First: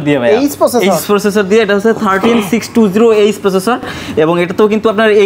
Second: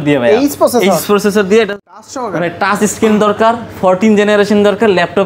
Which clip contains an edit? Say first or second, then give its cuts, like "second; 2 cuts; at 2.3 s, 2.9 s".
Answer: second; 1 cut; at 1.7 s